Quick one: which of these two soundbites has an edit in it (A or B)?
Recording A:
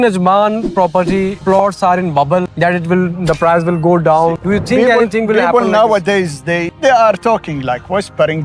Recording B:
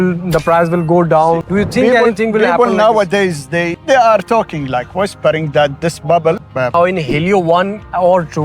B